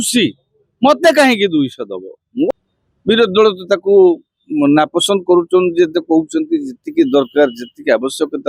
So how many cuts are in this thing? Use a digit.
1